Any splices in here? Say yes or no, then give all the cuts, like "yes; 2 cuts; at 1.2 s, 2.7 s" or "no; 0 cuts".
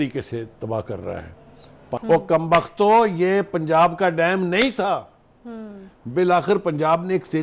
yes; 1 cut; at 2.0 s